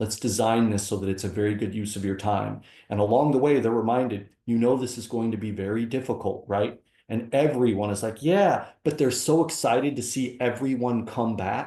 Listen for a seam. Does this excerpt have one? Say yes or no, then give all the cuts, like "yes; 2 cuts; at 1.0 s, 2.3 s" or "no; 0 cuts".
no; 0 cuts